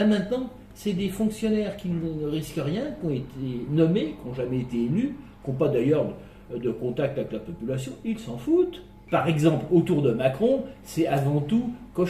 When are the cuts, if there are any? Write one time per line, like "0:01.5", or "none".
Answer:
0:08.9